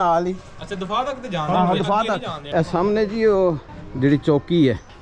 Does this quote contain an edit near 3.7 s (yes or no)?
yes